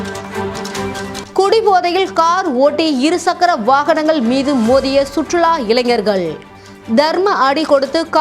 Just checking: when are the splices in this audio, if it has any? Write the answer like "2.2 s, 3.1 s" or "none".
1.2 s